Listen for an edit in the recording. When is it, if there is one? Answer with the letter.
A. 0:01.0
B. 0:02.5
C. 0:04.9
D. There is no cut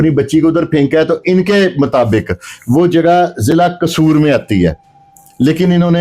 D